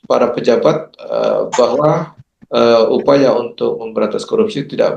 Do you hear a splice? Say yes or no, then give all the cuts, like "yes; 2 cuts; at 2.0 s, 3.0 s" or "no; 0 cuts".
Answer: no; 0 cuts